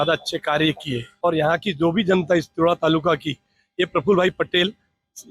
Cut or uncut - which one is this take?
cut